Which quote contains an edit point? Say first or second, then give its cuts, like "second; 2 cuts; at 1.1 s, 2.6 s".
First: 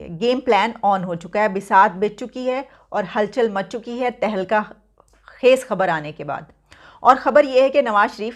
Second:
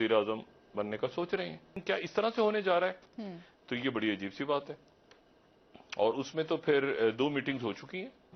second; 1 cut; at 1.8 s